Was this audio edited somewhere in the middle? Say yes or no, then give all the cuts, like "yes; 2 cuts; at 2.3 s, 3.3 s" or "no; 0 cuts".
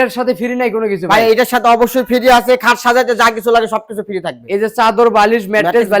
yes; 1 cut; at 2.6 s